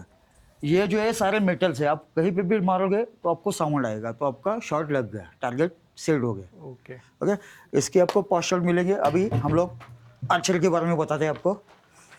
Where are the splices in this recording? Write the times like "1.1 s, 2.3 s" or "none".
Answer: none